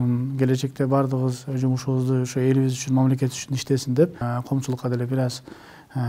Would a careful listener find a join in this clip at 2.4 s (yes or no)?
no